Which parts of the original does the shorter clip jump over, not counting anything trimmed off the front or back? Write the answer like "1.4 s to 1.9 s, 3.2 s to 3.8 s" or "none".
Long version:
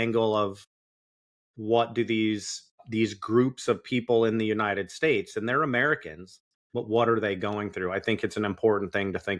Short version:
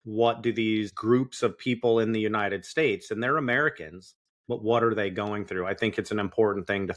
2.5 s to 3.2 s